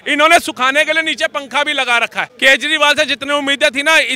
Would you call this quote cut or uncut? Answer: cut